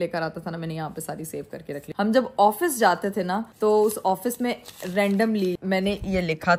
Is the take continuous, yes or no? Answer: no